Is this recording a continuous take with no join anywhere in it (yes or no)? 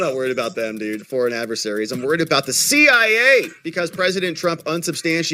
yes